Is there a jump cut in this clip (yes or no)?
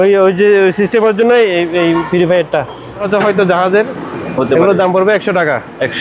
yes